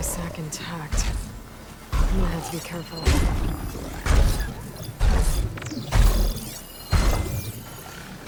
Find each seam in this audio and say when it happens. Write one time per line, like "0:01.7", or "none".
none